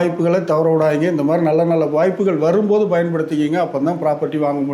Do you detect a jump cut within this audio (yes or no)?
no